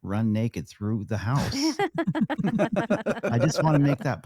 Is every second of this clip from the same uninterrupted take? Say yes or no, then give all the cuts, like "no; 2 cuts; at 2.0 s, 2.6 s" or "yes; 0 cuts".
yes; 0 cuts